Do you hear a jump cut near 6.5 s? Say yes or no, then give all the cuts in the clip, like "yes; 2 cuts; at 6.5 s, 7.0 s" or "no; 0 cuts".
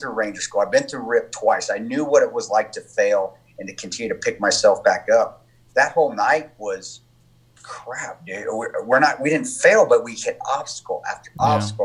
no; 0 cuts